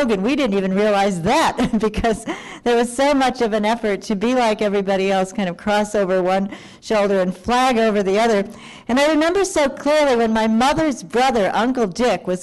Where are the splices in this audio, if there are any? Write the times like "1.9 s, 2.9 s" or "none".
11.0 s